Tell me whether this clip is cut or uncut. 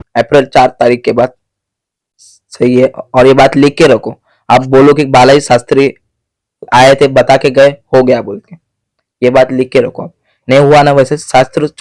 uncut